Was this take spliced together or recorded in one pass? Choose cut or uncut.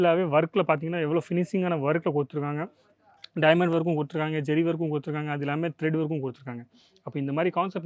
uncut